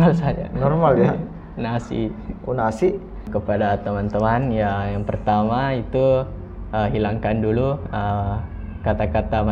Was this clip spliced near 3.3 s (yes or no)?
yes